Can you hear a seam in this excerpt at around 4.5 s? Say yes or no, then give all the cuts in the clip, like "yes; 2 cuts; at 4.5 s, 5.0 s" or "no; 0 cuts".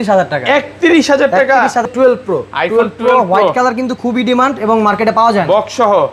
no; 1 cut; at 1.9 s